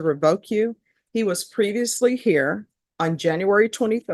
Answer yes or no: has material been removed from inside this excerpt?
no